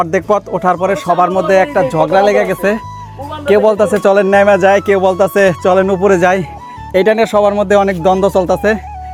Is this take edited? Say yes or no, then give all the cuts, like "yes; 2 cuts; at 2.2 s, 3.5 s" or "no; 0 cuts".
no; 0 cuts